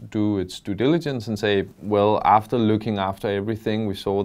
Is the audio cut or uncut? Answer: uncut